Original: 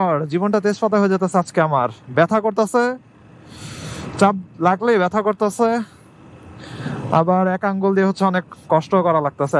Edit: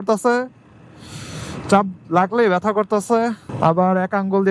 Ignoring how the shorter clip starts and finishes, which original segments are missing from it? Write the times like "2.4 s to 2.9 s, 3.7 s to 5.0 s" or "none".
6.0 s to 7.0 s